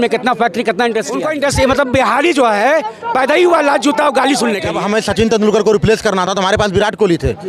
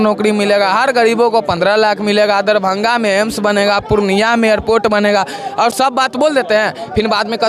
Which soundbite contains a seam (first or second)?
first